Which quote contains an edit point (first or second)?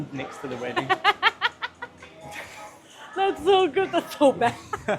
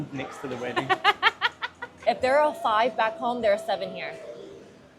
second